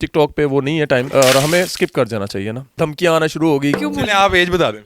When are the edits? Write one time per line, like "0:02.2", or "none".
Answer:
0:01.1
0:02.8
0:03.8